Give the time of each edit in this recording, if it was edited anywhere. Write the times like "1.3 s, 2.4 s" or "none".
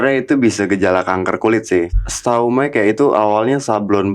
1.9 s